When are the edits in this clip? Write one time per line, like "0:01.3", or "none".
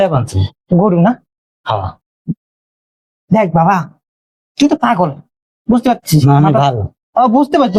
none

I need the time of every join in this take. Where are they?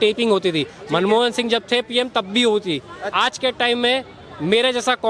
0:03.0

